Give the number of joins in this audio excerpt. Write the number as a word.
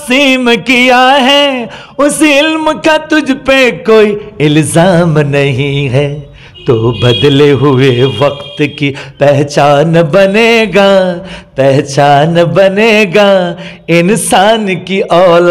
zero